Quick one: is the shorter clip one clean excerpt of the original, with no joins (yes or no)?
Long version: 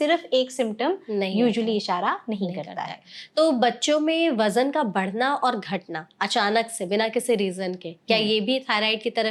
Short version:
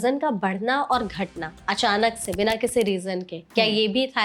yes